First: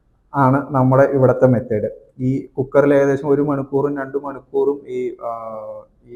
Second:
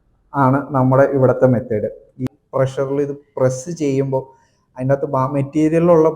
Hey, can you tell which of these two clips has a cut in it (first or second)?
second